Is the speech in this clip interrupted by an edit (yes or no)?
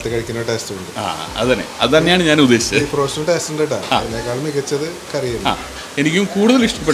no